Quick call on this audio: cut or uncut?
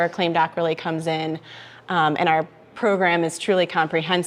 uncut